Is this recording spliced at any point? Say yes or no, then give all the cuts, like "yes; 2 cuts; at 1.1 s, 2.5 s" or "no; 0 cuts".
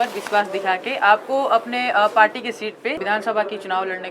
yes; 1 cut; at 3.0 s